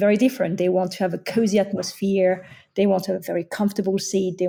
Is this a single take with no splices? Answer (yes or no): yes